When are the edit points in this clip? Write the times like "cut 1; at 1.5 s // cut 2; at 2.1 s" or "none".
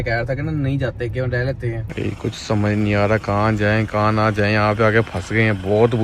cut 1; at 1.9 s